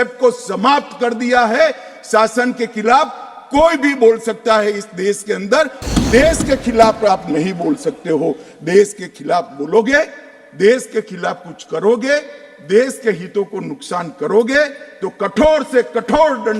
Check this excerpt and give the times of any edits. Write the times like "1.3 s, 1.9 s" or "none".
5.8 s